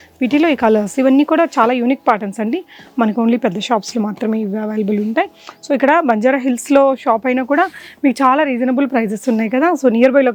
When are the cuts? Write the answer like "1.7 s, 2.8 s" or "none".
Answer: none